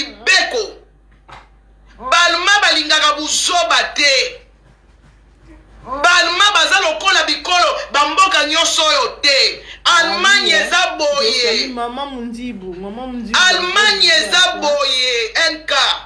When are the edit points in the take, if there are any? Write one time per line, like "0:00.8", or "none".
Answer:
none